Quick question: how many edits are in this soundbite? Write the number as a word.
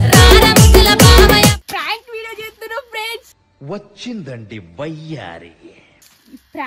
one